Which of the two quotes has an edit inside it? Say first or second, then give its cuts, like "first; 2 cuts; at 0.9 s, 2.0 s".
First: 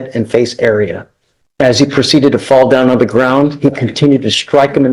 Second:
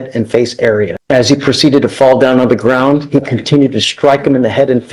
second; 1 cut; at 1.0 s